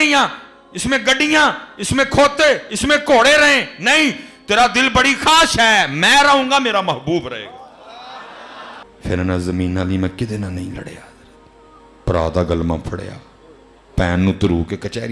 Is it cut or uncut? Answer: cut